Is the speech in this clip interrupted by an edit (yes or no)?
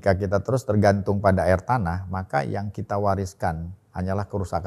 no